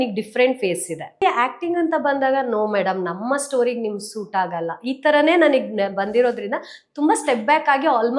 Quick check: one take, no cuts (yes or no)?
no